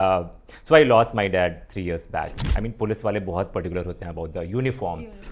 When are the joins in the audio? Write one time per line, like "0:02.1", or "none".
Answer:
0:02.4